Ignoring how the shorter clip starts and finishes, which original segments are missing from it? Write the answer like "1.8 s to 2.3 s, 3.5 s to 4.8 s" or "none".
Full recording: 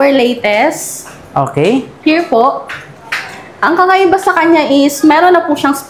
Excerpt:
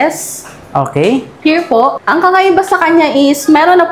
2.6 s to 3.6 s